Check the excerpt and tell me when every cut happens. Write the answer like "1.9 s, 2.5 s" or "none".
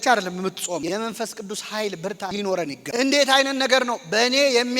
2.9 s